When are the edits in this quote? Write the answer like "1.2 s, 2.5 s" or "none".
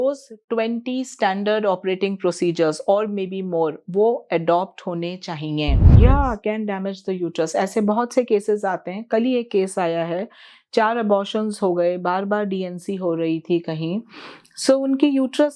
6.0 s